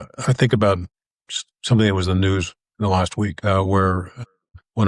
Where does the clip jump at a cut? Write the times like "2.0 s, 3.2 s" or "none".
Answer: none